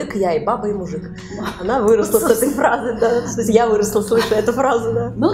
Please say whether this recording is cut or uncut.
uncut